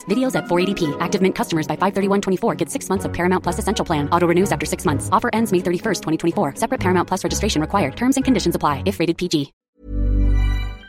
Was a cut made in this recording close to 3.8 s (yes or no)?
no